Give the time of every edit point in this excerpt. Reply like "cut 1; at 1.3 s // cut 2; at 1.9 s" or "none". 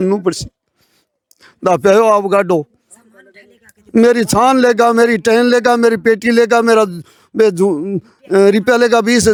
none